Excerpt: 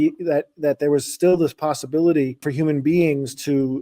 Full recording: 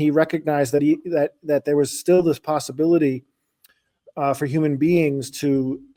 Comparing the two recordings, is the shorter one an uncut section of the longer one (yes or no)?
no